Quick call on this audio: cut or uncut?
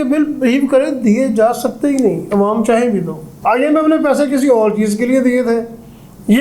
cut